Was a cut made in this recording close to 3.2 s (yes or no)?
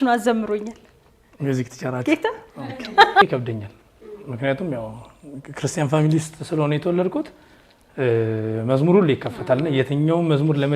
yes